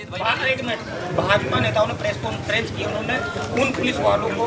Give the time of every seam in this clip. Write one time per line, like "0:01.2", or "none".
none